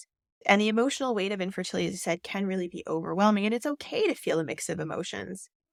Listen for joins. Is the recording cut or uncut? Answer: uncut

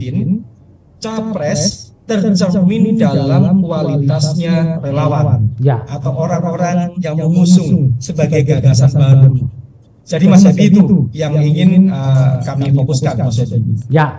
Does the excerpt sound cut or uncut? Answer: uncut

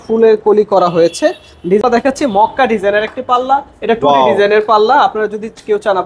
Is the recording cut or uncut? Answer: cut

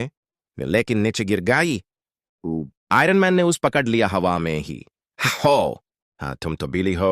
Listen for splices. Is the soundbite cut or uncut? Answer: cut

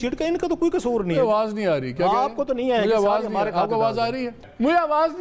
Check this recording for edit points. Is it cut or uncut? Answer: uncut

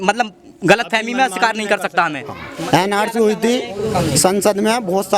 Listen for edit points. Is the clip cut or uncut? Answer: cut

